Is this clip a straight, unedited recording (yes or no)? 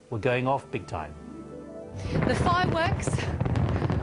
yes